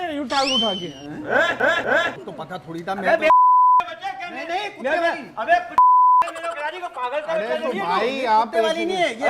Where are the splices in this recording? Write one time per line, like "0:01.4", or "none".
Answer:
0:02.1